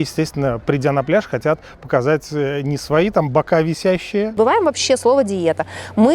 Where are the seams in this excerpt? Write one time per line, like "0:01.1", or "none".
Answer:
0:04.3